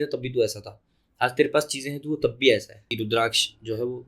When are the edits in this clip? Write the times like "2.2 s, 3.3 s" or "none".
2.8 s